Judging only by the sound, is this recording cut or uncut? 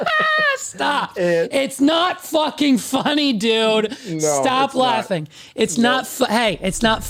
uncut